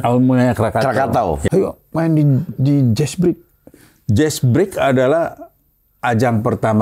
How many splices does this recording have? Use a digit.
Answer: 1